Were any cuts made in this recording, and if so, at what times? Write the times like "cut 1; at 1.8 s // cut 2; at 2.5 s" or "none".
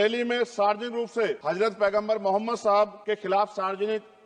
cut 1; at 1.4 s // cut 2; at 3.0 s